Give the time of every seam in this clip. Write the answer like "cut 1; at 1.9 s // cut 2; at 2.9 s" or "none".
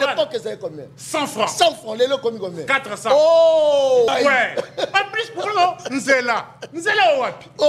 cut 1; at 4.1 s